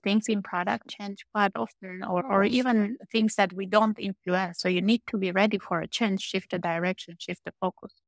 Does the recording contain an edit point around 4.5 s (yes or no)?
yes